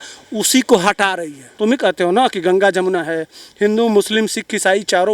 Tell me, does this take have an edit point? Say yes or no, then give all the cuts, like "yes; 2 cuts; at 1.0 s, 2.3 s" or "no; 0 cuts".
yes; 1 cut; at 1.6 s